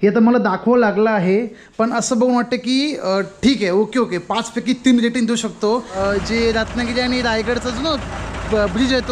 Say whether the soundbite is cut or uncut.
cut